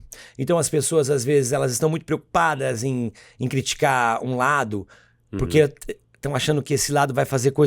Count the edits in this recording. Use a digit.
0